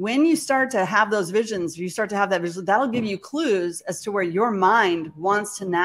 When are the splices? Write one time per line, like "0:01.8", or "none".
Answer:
none

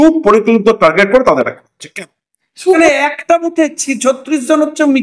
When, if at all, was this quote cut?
0:02.7

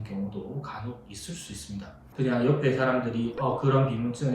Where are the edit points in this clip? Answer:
0:02.0

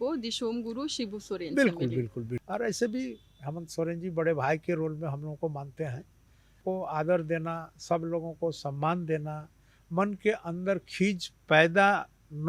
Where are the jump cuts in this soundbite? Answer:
0:02.4
0:06.6

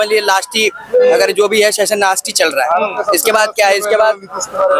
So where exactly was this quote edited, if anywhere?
none

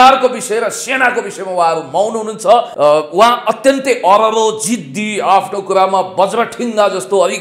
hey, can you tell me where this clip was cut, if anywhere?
0:02.7

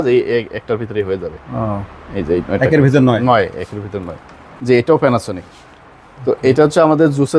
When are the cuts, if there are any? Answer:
0:04.5

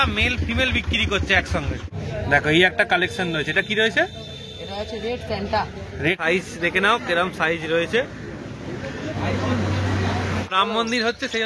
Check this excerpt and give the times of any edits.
0:01.9
0:06.2
0:10.5

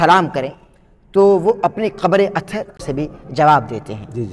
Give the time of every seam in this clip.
0:02.8

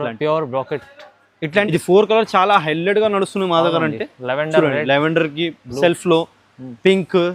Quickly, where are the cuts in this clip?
0:01.7

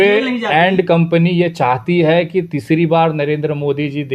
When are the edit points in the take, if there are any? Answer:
none

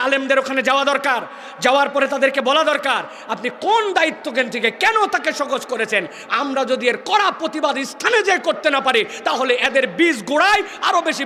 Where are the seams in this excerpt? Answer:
none

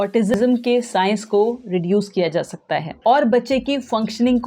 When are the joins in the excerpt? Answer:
0:02.9

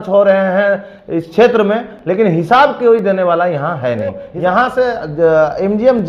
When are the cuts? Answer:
0:04.3

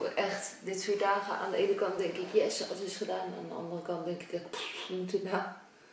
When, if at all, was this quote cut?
none

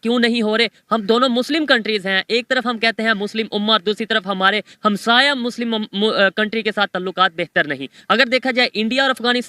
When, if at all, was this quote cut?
none

